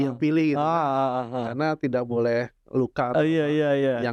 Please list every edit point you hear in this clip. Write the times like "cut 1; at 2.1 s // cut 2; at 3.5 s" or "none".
none